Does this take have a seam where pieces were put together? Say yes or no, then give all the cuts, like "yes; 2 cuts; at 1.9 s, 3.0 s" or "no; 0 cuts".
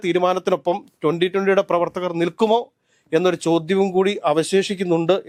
no; 0 cuts